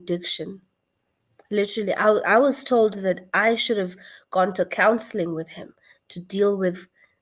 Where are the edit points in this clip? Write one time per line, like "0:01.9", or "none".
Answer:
none